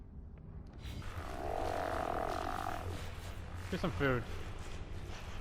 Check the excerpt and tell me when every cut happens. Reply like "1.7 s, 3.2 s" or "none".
1.0 s